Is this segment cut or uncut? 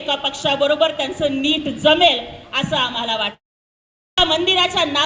uncut